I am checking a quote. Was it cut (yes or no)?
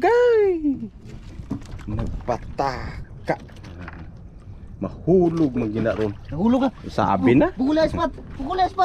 no